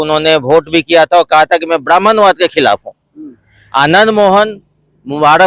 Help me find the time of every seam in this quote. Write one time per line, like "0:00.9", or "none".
none

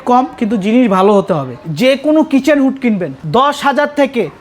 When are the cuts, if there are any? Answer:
0:01.6
0:03.2

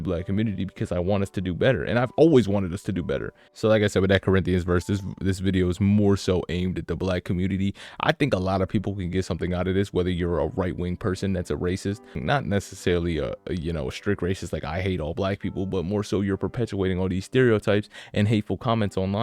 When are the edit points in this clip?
0:03.5
0:12.2

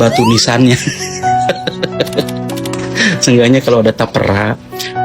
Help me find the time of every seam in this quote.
0:02.5

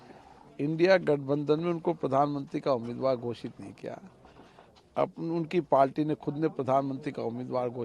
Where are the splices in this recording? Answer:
none

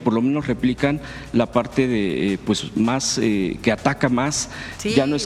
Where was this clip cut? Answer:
none

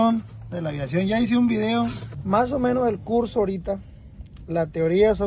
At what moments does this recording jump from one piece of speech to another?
0:02.1

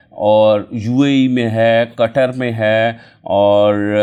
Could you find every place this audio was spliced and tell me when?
none

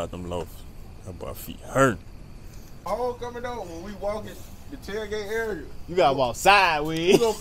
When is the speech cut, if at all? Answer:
0:02.9

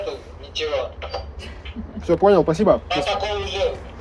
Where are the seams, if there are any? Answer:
none

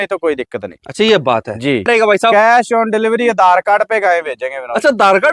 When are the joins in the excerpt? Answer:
0:01.9

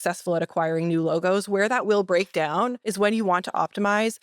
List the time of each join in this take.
0:02.8

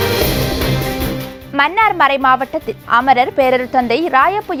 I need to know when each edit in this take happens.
none

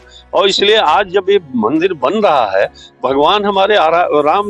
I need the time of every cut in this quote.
0:02.3

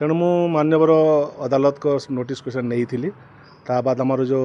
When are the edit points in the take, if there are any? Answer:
none

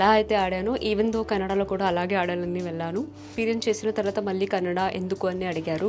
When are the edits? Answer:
0:03.3

